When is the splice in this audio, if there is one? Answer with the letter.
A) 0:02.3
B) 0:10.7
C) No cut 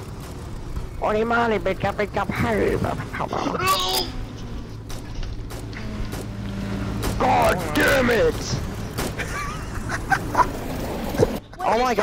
C